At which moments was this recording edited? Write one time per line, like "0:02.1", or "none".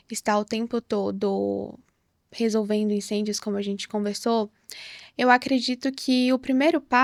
none